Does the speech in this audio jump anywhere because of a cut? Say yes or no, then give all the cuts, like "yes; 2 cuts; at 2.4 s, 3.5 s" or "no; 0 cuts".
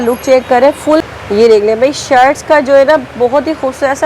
yes; 1 cut; at 1.1 s